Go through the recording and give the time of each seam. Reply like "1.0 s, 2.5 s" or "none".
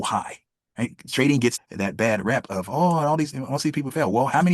1.6 s